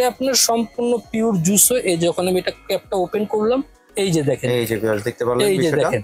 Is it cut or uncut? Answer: uncut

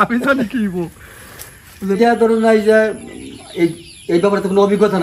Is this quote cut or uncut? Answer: cut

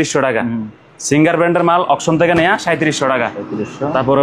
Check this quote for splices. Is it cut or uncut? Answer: uncut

